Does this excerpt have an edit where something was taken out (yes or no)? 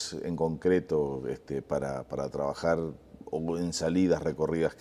yes